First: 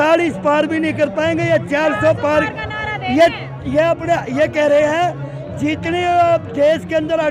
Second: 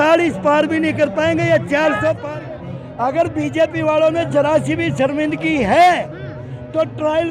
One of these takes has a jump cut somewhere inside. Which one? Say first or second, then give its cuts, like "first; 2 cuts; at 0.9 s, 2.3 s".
second; 1 cut; at 2.2 s